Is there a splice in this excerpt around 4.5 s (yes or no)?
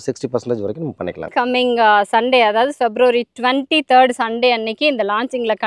no